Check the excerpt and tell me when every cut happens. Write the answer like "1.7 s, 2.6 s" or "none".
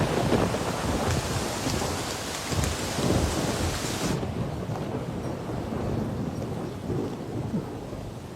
none